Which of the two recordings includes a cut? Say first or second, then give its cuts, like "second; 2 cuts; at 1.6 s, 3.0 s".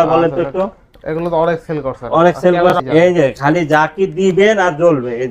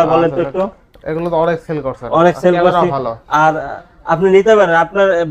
first; 1 cut; at 2.8 s